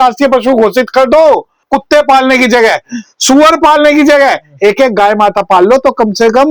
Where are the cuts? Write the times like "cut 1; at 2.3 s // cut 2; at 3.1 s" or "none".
cut 1; at 1.7 s